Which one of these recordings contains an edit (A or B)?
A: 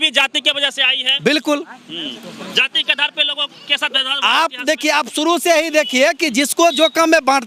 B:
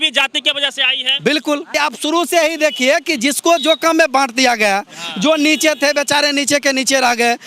B